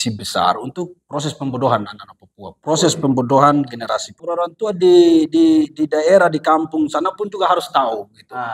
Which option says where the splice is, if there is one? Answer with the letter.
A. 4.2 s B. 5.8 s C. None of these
A